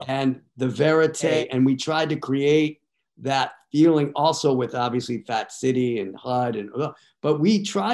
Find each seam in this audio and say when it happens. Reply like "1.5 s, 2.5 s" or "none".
1.3 s

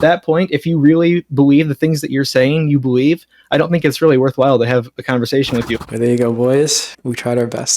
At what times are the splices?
5.8 s, 6.9 s

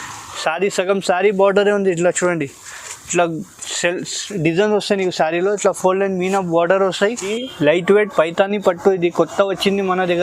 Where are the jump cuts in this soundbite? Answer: 7.4 s

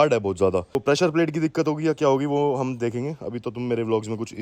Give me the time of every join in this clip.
none

